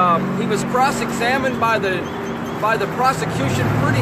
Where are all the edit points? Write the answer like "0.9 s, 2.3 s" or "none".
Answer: none

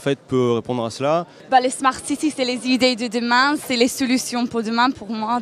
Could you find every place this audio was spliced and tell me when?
3.0 s

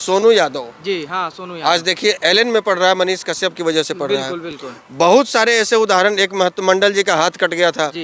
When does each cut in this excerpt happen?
none

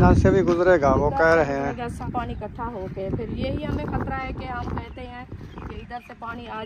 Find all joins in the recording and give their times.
2.0 s

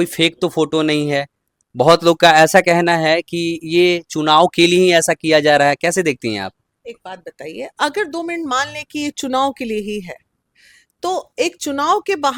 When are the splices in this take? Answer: none

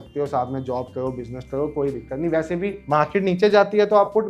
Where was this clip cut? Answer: 2.8 s

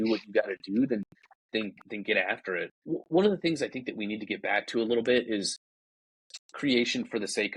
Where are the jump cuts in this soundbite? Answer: 2.7 s

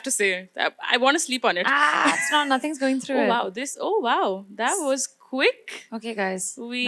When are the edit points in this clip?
none

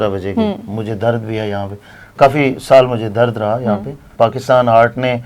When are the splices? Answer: 4.1 s

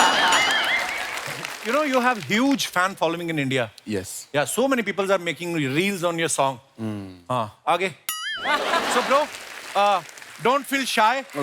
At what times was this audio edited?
1.5 s, 8.9 s

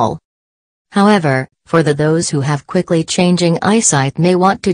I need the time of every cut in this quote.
3.6 s

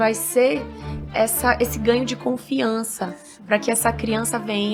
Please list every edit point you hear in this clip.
none

